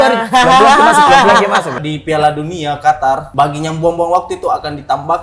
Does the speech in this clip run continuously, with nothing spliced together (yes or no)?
no